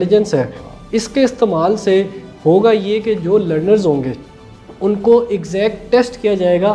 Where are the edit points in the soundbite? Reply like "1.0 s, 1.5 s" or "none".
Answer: none